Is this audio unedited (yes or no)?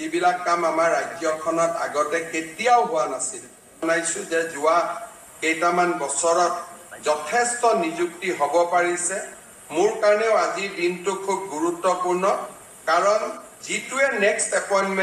no